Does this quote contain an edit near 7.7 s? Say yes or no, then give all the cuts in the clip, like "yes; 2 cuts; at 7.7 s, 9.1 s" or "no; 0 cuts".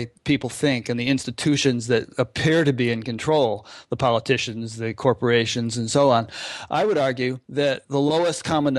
yes; 1 cut; at 7.7 s